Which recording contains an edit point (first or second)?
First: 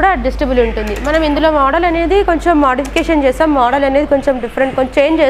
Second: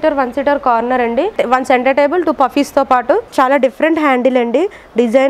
second